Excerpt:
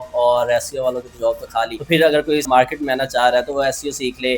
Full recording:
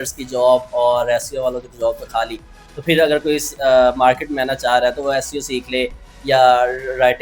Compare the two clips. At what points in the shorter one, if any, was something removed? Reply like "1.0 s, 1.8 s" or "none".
1.8 s, 2.5 s